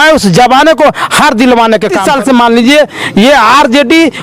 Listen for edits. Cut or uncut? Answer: cut